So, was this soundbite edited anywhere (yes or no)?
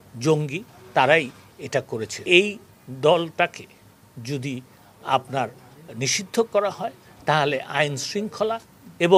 yes